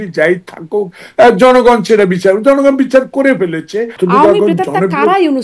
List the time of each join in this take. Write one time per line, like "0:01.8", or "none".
0:03.9